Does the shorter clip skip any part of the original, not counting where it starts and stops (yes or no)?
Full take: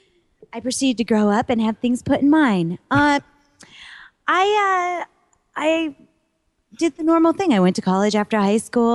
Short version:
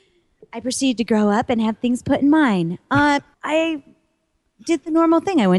yes